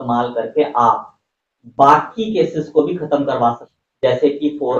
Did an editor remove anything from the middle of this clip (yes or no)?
yes